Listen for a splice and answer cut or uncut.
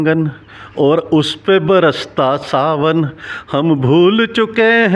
uncut